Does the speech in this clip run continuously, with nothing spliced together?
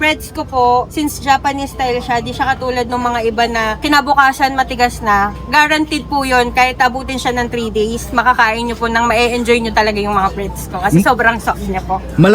no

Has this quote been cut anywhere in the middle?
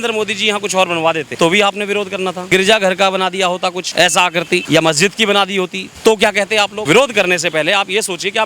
yes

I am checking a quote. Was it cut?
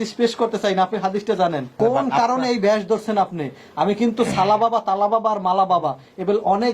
yes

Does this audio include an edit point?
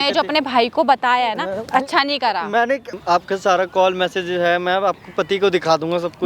yes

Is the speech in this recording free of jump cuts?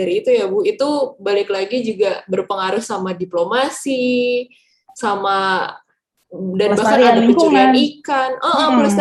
yes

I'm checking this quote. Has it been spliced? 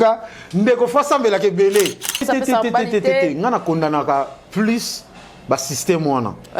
yes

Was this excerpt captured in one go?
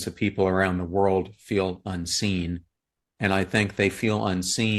yes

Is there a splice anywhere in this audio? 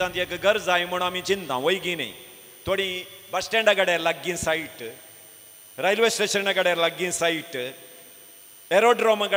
no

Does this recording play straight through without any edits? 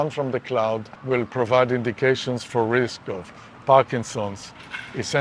no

